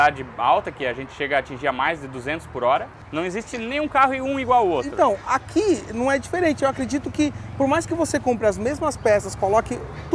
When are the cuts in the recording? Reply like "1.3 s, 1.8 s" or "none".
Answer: 3.0 s